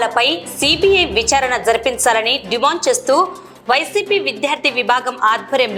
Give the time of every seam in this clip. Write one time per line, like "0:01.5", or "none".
none